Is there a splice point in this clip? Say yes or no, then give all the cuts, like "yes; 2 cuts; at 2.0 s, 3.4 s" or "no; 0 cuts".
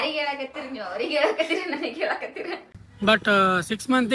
yes; 1 cut; at 2.7 s